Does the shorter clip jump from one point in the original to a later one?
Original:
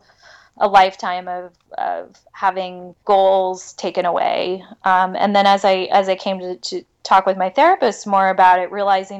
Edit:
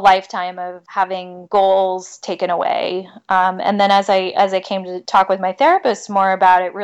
yes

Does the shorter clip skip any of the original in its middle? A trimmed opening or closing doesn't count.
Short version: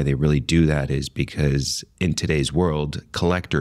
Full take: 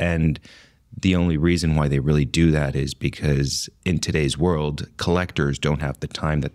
no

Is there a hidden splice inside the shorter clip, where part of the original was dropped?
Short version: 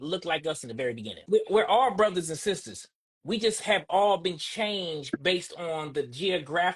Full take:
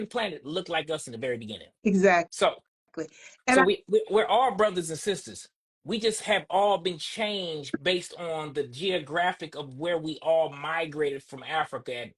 yes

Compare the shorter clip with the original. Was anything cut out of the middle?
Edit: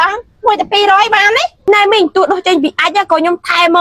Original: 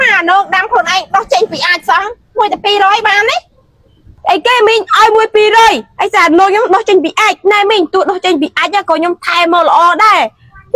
yes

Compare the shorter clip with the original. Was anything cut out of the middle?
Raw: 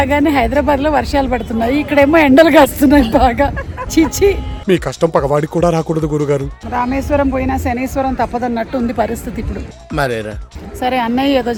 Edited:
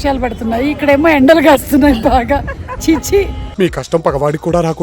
no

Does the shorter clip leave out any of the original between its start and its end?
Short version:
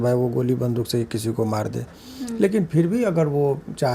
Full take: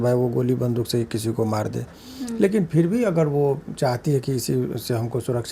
no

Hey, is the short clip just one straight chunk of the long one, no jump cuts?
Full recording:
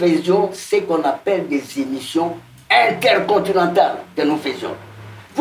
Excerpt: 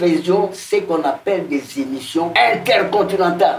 no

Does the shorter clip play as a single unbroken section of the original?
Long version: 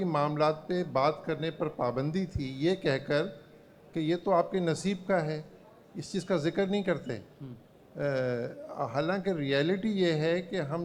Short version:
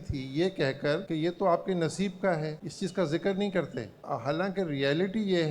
no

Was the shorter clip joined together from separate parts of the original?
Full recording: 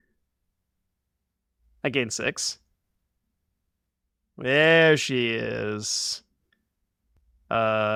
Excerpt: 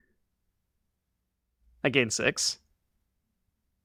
no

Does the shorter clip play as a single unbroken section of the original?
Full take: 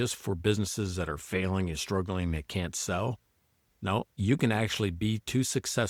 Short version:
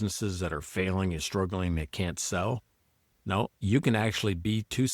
yes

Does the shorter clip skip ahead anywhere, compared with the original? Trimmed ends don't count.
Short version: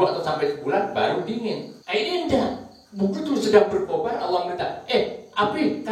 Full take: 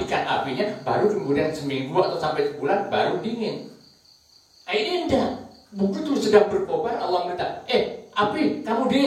yes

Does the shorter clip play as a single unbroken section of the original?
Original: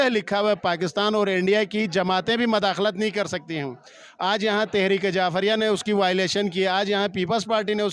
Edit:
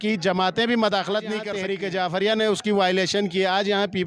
no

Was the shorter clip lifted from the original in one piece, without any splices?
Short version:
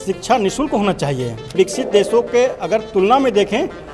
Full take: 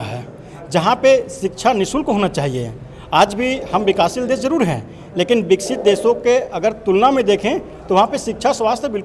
no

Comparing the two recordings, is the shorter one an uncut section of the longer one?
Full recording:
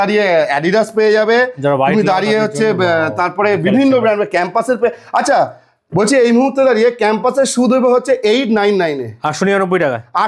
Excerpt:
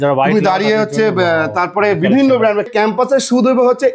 no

